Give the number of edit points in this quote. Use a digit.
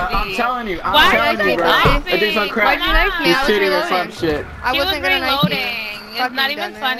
0